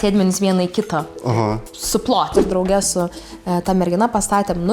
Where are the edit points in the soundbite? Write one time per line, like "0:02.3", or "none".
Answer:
0:02.3